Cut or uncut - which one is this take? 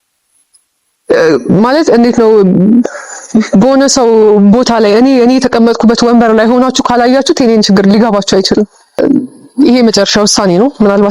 cut